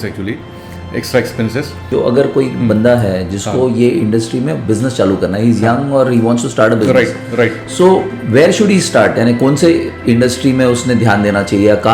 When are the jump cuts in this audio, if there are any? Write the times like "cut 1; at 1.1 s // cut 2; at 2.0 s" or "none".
cut 1; at 1.8 s